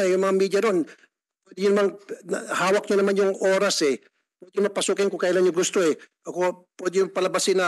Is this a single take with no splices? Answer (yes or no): yes